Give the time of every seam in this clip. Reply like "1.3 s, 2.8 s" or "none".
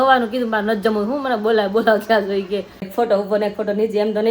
2.9 s